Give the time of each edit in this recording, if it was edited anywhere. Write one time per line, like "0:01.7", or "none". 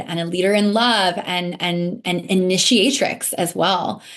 none

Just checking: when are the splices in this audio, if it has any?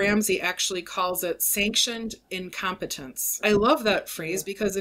0:03.3

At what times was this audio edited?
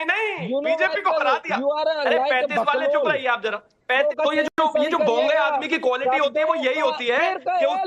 0:04.0

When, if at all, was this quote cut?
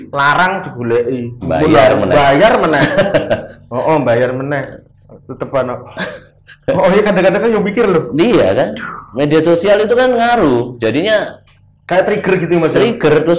none

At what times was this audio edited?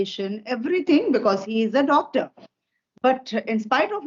none

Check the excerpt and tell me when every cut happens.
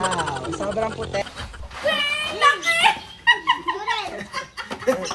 0:01.2

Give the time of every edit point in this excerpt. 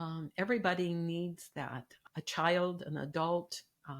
0:01.9

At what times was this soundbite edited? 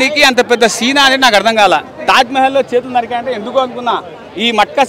none

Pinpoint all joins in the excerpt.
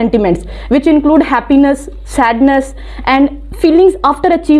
none

